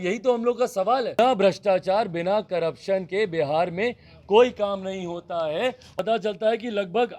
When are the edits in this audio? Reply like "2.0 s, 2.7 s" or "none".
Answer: 1.2 s, 5.9 s

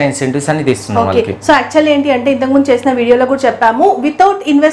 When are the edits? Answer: none

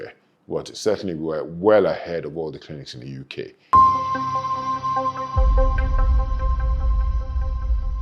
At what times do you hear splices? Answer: 3.6 s

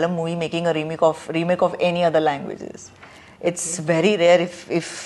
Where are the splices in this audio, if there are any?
none

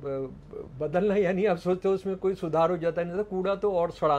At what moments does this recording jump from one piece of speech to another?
none

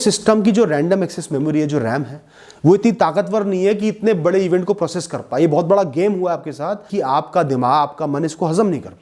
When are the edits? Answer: 6.9 s

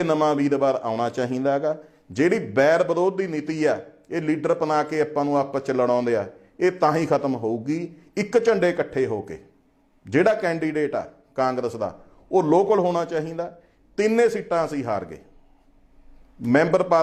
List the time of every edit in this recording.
none

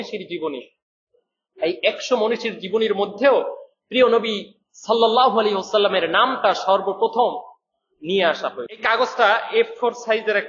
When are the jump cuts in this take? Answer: 8.8 s

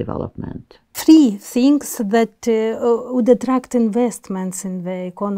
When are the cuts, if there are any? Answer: 1.0 s

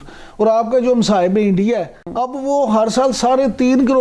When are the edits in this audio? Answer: 2.1 s

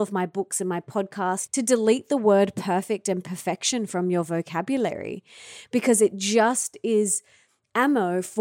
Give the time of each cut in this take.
1.4 s

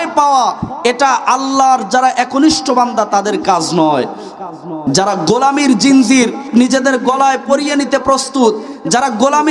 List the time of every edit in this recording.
6.4 s

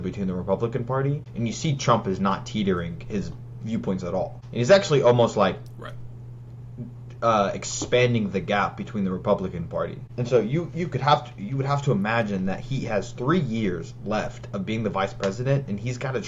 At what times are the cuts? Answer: 1.3 s, 4.4 s, 10.1 s

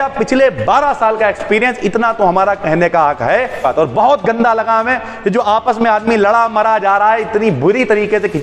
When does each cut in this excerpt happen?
3.6 s

